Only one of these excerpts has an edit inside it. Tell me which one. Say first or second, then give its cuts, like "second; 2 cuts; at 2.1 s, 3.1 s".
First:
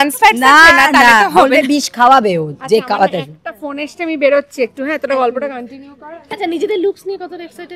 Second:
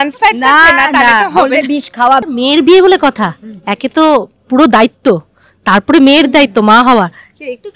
second; 1 cut; at 2.2 s